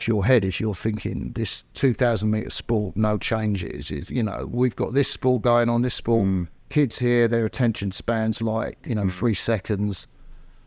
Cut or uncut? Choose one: uncut